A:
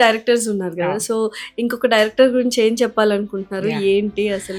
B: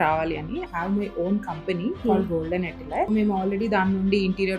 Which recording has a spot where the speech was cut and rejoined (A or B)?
B